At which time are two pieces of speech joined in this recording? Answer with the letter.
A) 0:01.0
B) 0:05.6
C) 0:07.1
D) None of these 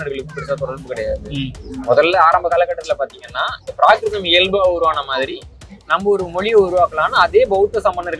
D